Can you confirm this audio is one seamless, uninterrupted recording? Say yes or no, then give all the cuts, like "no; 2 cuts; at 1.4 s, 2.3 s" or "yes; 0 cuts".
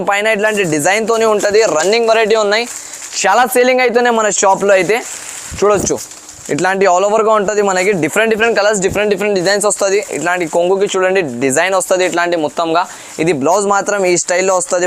yes; 0 cuts